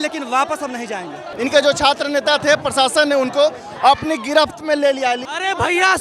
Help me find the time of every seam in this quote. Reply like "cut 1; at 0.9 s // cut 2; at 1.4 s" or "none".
cut 1; at 1.3 s // cut 2; at 5.2 s